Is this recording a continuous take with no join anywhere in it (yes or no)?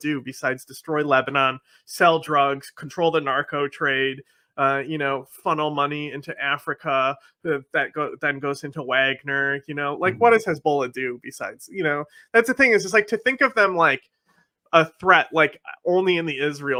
yes